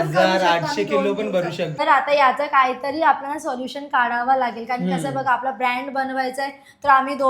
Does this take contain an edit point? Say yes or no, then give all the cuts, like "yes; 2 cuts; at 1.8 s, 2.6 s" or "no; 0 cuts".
yes; 1 cut; at 1.8 s